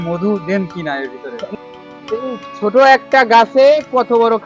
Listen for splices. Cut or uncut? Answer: cut